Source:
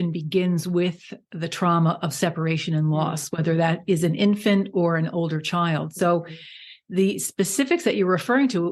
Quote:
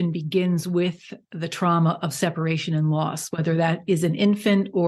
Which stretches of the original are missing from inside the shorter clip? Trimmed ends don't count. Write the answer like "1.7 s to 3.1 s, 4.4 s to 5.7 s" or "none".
none